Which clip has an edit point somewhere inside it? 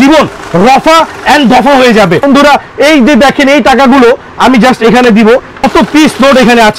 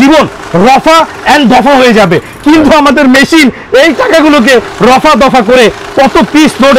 first; 2 cuts; at 2.2 s, 5.6 s

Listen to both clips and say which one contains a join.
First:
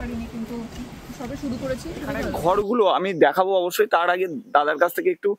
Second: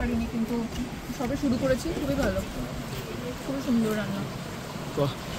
first; 1 cut; at 2.3 s

